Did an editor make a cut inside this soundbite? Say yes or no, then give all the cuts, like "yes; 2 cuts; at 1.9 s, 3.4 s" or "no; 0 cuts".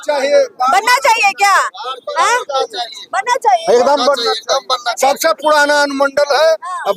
no; 0 cuts